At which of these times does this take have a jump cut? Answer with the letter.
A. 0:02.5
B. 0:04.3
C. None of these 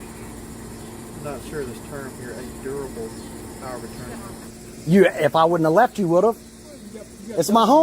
B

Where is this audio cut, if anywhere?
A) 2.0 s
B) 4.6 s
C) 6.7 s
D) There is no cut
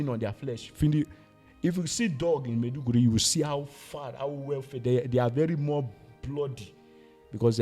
D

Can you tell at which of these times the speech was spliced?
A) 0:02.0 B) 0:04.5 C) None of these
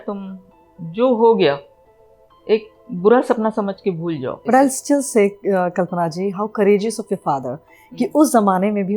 B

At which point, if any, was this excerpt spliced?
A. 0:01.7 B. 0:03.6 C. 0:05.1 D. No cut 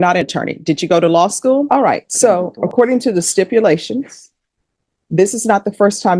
A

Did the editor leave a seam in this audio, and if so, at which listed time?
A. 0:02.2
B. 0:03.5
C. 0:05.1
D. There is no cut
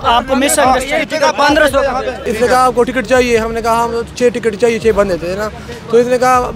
A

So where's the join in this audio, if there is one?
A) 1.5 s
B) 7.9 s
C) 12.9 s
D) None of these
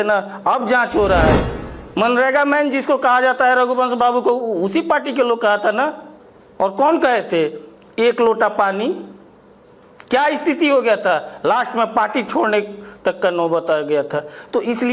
A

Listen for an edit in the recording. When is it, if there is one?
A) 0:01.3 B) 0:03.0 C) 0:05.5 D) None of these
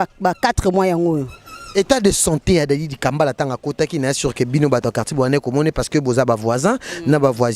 D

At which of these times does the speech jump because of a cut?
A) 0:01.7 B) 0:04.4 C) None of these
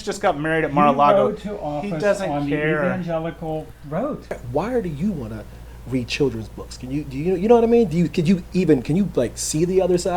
B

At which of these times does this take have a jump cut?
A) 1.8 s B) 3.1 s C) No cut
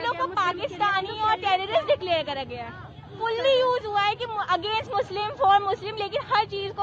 B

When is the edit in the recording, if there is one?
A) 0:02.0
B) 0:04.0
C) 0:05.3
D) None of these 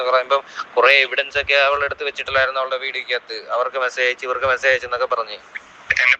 D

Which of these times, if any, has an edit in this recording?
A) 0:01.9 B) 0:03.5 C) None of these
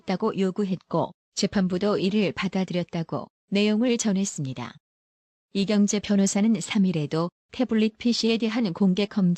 B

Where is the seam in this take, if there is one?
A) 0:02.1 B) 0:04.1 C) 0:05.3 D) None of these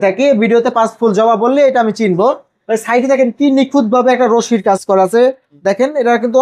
D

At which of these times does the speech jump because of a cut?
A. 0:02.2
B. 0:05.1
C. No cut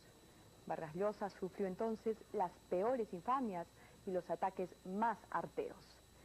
B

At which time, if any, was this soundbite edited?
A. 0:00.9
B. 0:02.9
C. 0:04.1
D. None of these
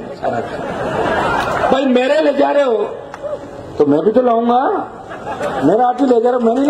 D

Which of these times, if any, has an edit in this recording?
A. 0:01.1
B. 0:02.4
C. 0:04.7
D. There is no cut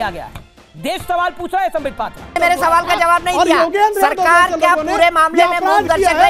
B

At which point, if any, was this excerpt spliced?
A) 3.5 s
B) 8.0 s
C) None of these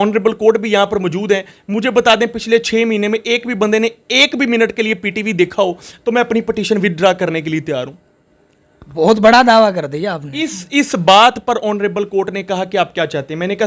C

